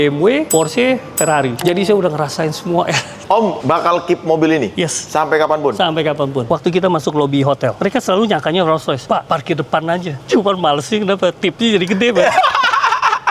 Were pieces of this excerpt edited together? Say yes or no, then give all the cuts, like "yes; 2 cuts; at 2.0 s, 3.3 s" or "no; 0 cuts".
yes; 5 cuts; at 1.6 s, 3.1 s, 6.5 s, 7.8 s, 10.2 s